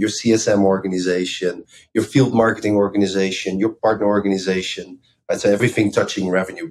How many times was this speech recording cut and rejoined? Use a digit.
3